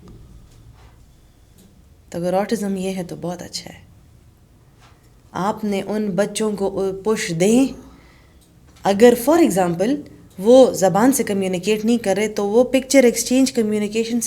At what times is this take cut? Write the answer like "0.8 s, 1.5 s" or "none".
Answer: none